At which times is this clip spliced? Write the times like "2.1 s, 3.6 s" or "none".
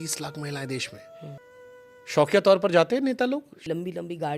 1.4 s, 3.5 s